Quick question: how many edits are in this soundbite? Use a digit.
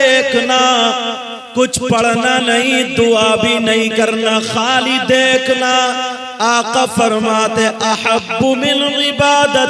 0